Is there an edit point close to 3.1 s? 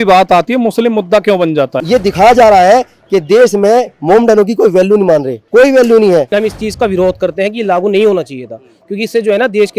no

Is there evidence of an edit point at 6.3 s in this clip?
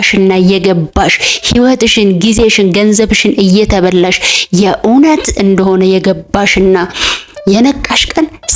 no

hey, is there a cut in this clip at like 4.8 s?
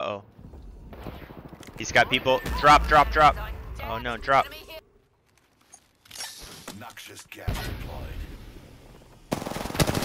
yes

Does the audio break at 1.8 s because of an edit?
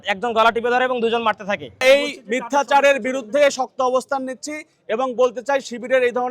yes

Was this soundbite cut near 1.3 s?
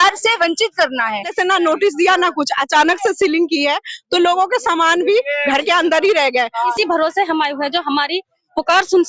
yes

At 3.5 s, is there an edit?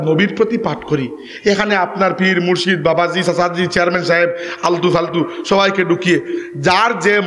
no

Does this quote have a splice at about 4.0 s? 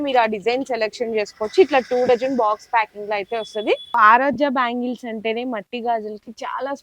yes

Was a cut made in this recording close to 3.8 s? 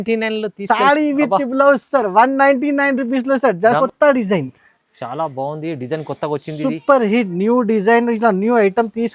yes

